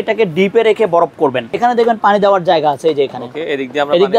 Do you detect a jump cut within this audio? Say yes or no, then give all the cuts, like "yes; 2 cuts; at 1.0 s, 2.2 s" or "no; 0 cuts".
yes; 1 cut; at 1.5 s